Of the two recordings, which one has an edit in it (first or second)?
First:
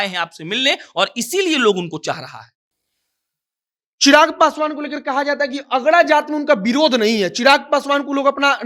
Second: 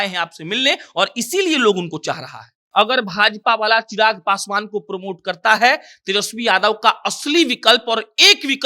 second